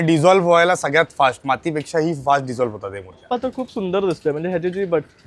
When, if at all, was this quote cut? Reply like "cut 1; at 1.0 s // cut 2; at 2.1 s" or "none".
cut 1; at 3.3 s